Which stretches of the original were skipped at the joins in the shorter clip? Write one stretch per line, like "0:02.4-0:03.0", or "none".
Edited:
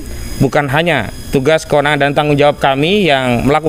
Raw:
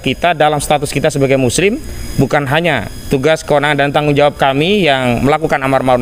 none

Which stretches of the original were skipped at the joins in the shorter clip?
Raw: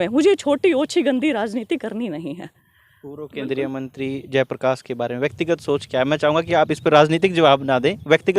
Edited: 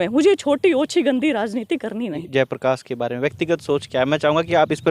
0:02.2-0:04.2

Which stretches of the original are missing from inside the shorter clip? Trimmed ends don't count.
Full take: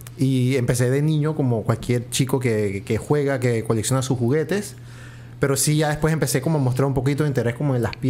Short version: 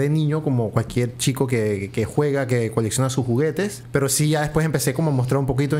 0:04.7-0:05.3

